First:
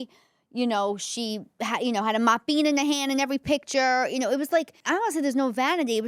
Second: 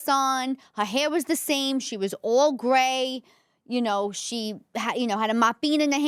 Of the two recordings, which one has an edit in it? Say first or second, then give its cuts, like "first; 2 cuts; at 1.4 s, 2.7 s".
first; 1 cut; at 4.8 s